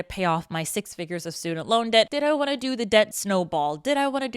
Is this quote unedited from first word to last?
no; 2 cuts; at 2.1 s, 3.2 s

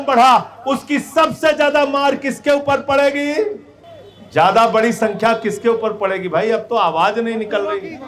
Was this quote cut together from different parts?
no; 0 cuts

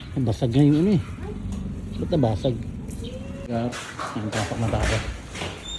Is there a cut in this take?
yes; 1 cut; at 3.5 s

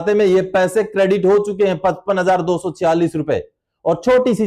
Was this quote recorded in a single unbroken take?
yes; 0 cuts

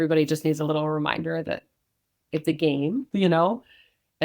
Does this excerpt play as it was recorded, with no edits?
no; 1 cut; at 3.1 s

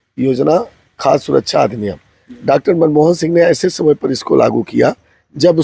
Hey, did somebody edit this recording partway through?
no; 0 cuts

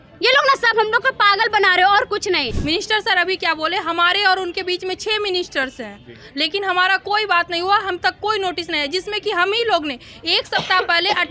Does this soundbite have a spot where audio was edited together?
yes; 1 cut; at 2.5 s

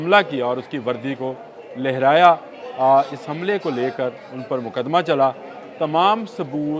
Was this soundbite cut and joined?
no; 0 cuts

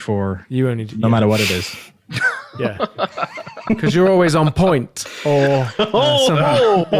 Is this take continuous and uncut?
yes; 0 cuts

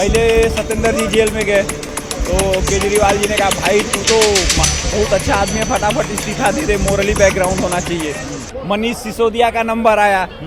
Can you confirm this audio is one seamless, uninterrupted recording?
yes; 0 cuts

